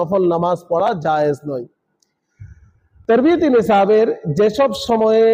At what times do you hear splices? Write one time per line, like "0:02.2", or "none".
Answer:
none